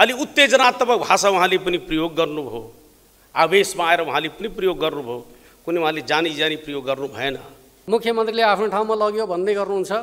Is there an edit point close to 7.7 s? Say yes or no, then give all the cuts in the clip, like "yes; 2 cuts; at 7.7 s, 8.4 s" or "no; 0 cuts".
yes; 1 cut; at 7.7 s